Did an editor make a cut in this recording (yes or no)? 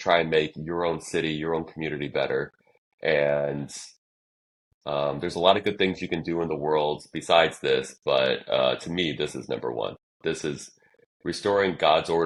no